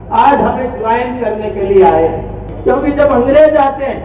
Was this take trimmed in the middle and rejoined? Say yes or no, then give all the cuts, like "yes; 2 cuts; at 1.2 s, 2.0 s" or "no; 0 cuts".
yes; 1 cut; at 2.5 s